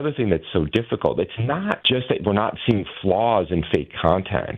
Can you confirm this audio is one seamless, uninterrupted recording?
no; 1 cut; at 1.8 s

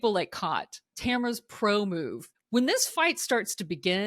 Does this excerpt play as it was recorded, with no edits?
no; 2 cuts; at 0.9 s, 2.2 s

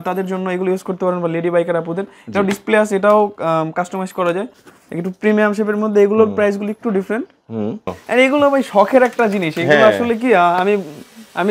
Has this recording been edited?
yes; 2 cuts; at 4.6 s, 8.0 s

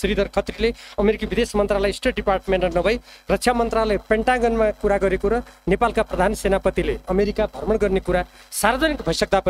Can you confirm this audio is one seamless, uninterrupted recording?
yes; 0 cuts

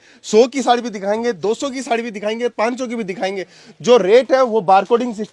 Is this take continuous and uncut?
yes; 0 cuts

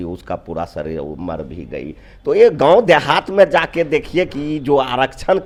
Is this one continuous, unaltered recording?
yes; 0 cuts

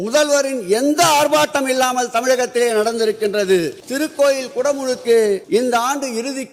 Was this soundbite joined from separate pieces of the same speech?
yes; 2 cuts; at 3.8 s, 5.4 s

